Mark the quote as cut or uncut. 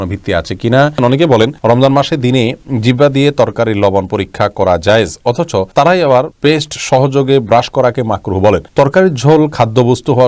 cut